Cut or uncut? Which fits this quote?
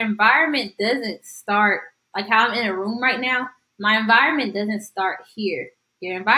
uncut